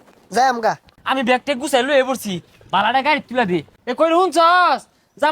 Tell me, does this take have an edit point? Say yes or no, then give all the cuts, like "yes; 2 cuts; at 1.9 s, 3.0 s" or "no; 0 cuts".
yes; 2 cuts; at 0.9 s, 3.7 s